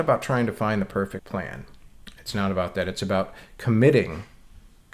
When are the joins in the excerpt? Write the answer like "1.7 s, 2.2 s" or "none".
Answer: 1.2 s